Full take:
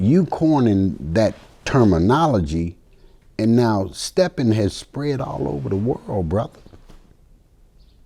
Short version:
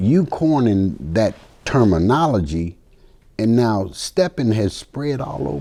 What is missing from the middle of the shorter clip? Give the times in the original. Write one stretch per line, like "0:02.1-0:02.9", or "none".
none